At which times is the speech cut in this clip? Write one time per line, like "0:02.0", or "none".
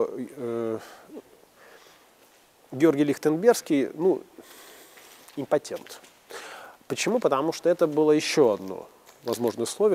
none